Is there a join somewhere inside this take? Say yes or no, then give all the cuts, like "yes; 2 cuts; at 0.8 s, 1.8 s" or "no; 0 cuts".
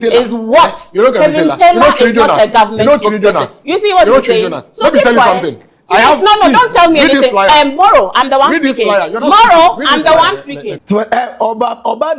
yes; 1 cut; at 10.8 s